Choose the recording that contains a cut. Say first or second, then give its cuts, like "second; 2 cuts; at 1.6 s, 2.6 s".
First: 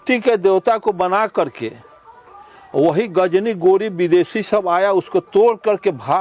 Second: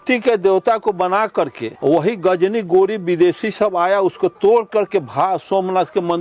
second; 1 cut; at 1.6 s